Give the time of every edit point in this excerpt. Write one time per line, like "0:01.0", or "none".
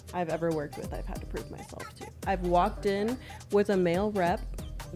none